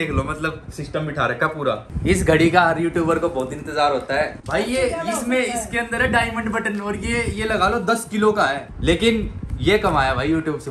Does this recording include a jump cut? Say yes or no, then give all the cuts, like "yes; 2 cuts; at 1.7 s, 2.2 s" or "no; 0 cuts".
yes; 3 cuts; at 1.8 s, 4.3 s, 8.7 s